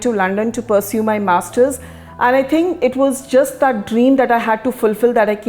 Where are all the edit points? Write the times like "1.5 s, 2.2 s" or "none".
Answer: none